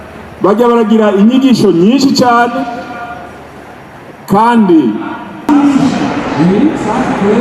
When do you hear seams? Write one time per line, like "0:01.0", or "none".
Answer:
0:05.5